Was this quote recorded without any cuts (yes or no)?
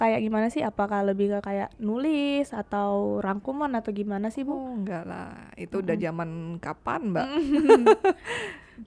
yes